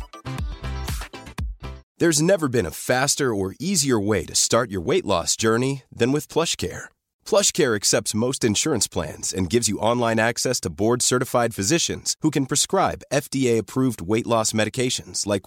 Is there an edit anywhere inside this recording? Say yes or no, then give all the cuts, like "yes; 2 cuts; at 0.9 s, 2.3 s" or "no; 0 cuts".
yes; 1 cut; at 1.8 s